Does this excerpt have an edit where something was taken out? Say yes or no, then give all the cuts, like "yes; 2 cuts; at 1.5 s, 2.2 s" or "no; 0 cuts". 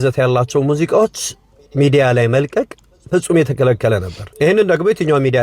yes; 1 cut; at 4.2 s